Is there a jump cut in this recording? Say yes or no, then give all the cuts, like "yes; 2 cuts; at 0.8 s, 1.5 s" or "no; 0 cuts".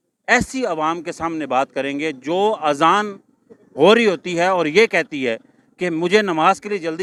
no; 0 cuts